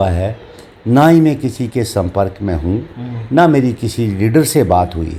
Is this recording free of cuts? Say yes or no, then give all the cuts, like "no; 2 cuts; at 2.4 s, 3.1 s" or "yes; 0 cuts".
yes; 0 cuts